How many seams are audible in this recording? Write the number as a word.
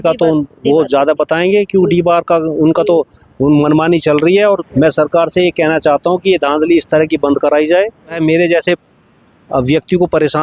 two